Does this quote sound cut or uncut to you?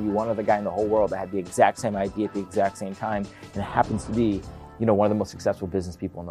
uncut